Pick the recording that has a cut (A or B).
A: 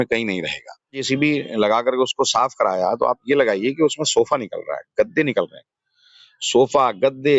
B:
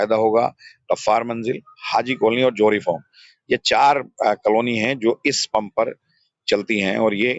A